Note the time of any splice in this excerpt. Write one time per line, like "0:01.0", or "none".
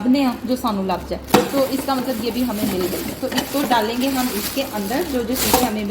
none